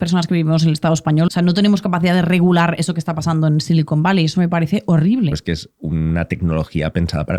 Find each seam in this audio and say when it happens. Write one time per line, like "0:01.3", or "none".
0:01.3
0:05.4

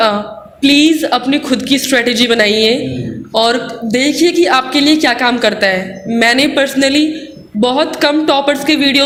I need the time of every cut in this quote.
none

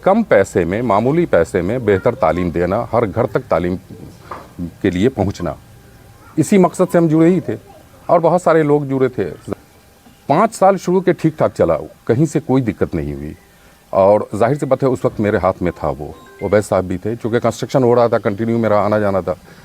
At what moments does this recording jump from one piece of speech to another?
0:09.5

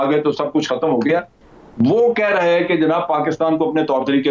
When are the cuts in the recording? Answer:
0:01.4

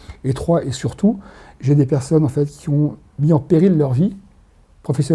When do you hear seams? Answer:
0:03.1

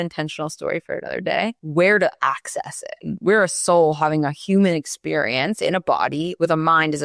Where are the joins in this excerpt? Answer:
0:01.6
0:03.1

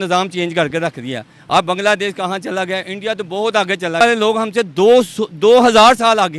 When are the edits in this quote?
0:04.0

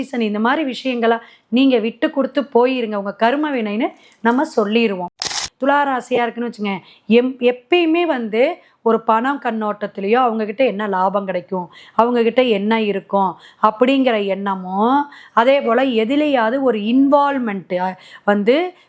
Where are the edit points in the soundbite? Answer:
0:05.3

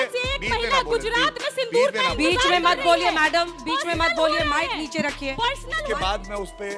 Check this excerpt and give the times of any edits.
0:05.7

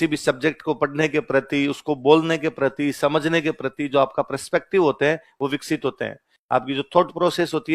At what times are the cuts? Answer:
none

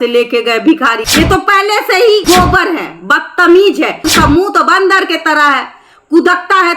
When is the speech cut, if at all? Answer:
0:01.0
0:04.1

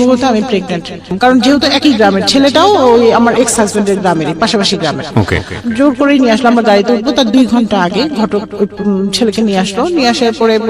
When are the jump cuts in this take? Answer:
0:01.2

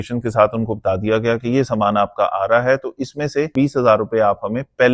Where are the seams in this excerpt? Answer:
0:03.5

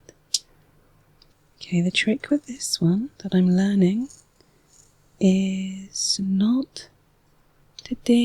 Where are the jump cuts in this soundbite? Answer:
0:01.3

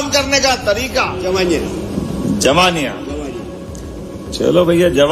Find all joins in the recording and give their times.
0:01.1

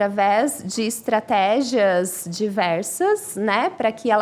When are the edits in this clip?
none

